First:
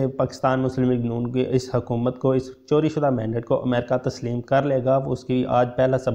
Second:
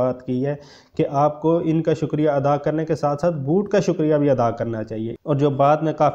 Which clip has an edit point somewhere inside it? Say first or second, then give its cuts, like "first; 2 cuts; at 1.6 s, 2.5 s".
second; 1 cut; at 5.1 s